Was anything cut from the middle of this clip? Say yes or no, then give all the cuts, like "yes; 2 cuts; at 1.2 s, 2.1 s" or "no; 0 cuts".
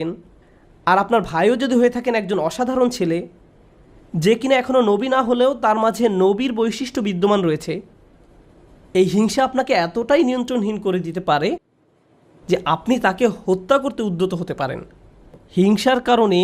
yes; 1 cut; at 15.4 s